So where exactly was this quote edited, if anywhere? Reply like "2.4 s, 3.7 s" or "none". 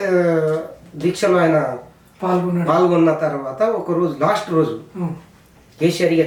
none

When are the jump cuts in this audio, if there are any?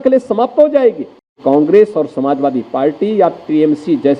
1.4 s

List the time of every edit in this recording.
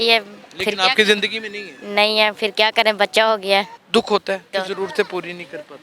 3.8 s, 4.5 s

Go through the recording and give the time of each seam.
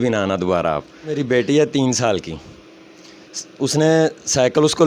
1.2 s

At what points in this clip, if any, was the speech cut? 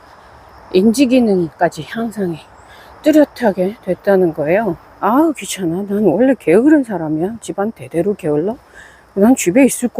4.9 s

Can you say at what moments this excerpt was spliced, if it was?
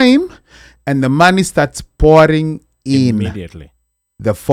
none

